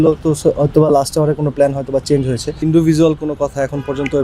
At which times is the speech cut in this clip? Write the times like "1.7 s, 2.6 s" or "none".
2.6 s